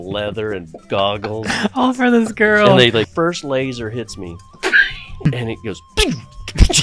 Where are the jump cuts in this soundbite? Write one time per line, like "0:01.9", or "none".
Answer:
0:03.1
0:05.3